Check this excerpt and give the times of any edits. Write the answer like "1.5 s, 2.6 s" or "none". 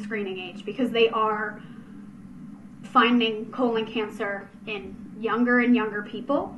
none